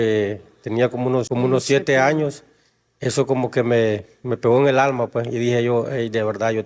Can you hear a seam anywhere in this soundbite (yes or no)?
yes